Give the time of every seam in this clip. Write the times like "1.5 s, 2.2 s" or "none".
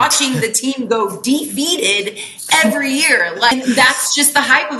3.5 s